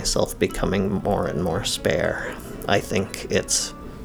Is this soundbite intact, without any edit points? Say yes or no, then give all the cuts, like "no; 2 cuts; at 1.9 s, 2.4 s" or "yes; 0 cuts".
no; 1 cut; at 2.5 s